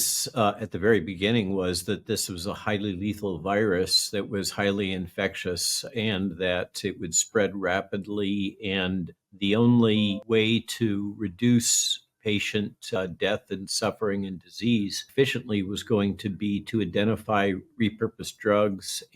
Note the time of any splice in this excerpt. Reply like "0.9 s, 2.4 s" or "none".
9.2 s, 10.2 s, 13.0 s, 15.1 s